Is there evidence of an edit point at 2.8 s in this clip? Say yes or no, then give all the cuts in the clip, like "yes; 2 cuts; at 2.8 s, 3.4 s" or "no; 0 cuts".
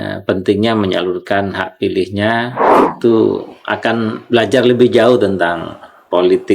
yes; 1 cut; at 2.8 s